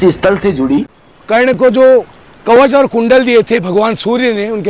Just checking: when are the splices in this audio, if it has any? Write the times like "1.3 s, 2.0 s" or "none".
1.0 s